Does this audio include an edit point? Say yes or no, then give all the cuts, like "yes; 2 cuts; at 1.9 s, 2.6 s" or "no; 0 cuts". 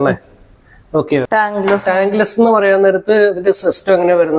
yes; 1 cut; at 1.3 s